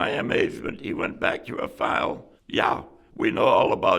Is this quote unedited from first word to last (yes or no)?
no